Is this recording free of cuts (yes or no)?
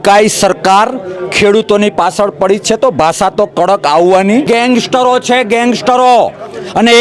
no